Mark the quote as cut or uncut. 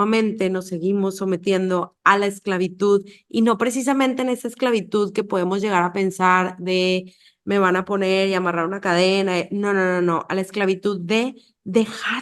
uncut